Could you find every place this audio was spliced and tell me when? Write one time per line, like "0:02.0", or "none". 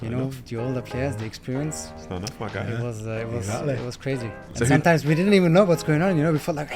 0:01.9